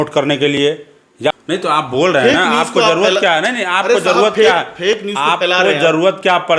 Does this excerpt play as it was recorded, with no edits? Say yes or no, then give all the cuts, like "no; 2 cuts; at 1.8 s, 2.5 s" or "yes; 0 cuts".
no; 1 cut; at 1.3 s